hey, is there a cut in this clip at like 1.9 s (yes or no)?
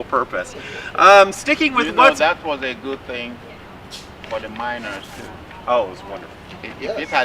yes